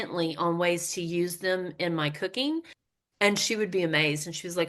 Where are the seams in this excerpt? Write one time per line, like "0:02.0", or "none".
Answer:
0:02.8